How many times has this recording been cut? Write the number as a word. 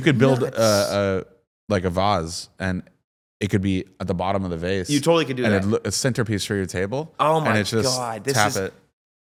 zero